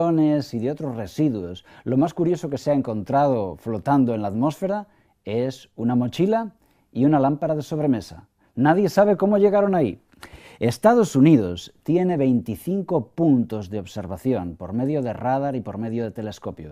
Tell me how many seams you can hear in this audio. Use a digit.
1